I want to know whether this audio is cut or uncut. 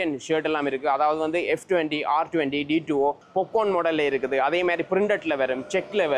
cut